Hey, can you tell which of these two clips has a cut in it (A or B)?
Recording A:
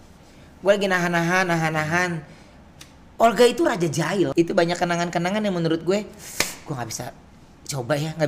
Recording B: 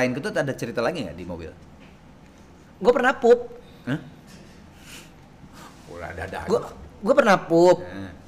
A